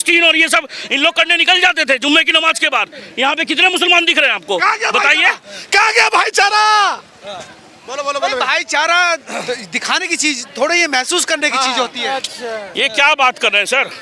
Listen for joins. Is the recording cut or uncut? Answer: uncut